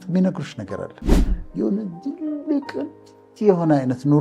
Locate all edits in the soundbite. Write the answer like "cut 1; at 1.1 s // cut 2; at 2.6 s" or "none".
cut 1; at 1.4 s

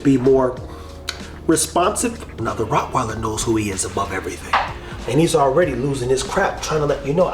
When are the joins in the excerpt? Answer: cut 1; at 2.4 s // cut 2; at 4.9 s

